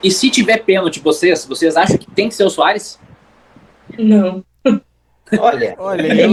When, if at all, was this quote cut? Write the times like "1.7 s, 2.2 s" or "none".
none